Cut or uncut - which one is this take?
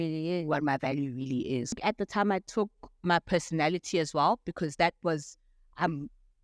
cut